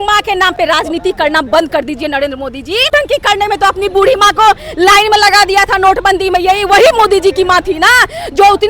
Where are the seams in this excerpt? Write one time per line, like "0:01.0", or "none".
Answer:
0:02.9